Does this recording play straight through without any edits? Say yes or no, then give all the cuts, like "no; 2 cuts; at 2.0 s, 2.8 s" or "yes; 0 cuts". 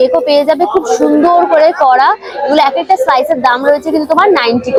yes; 0 cuts